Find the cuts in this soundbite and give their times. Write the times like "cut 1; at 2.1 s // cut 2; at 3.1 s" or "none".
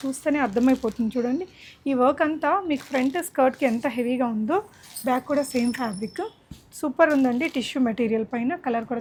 none